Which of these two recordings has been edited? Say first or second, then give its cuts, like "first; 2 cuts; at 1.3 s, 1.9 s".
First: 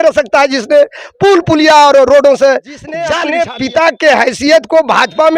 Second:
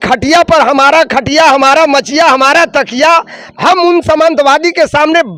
first; 1 cut; at 3.2 s